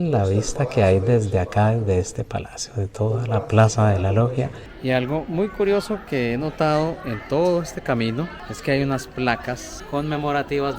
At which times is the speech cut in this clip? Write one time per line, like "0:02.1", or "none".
0:04.7
0:08.4
0:09.7